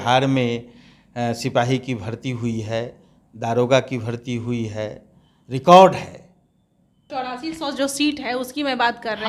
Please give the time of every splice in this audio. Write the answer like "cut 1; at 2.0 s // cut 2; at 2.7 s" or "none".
cut 1; at 7.0 s